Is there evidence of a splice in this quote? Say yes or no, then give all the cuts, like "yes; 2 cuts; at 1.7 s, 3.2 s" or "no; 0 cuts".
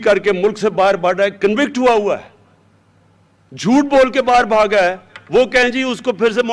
no; 0 cuts